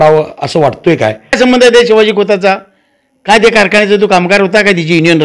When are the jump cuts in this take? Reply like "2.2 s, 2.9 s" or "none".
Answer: 1.3 s